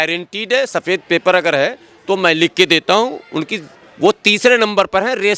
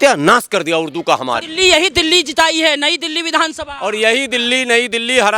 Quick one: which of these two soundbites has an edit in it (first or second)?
second